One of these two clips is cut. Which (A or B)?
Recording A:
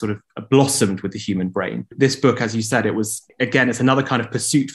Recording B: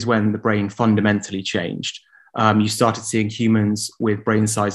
A